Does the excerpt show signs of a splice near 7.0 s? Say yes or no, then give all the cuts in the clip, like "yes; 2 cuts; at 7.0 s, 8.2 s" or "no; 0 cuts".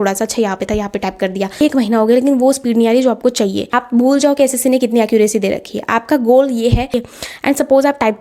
yes; 3 cuts; at 1.5 s, 3.6 s, 7.0 s